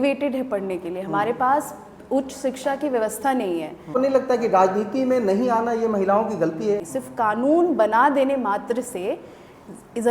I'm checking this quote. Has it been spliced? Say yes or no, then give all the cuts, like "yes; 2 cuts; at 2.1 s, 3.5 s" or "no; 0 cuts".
yes; 2 cuts; at 3.9 s, 6.9 s